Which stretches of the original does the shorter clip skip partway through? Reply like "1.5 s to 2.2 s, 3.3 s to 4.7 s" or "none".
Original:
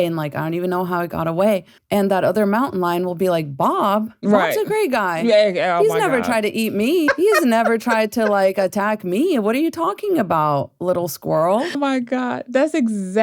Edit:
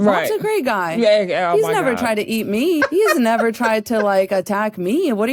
none